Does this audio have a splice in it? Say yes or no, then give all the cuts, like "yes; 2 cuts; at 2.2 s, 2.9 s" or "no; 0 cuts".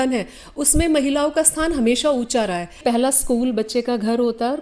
yes; 1 cut; at 2.8 s